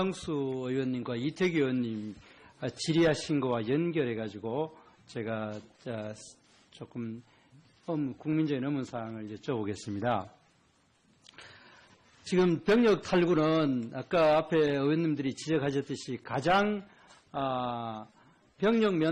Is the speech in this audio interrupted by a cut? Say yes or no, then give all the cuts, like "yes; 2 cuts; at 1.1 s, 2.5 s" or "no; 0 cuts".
no; 0 cuts